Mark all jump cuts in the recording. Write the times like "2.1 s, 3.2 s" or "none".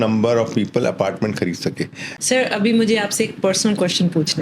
2.1 s